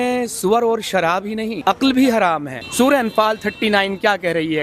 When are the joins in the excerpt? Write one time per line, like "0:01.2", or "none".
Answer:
0:01.6
0:02.6